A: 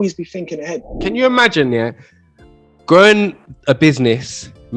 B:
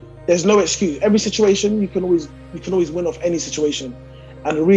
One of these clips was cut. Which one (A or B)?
A